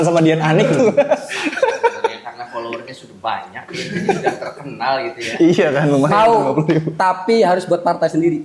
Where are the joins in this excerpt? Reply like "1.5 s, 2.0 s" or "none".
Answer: none

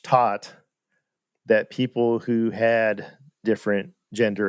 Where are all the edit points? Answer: 3.4 s

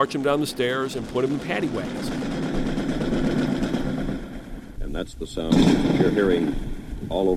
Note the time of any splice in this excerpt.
1.8 s

